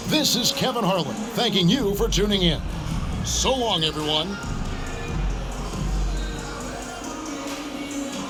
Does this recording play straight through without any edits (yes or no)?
yes